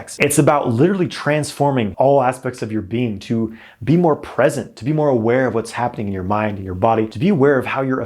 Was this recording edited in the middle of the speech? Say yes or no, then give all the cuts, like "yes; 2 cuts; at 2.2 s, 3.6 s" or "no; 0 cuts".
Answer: yes; 2 cuts; at 1.9 s, 7.1 s